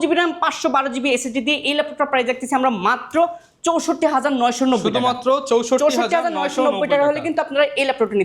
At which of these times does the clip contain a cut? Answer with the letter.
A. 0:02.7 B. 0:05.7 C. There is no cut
C